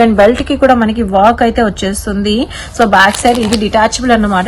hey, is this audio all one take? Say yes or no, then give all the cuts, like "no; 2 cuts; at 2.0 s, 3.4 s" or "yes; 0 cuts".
yes; 0 cuts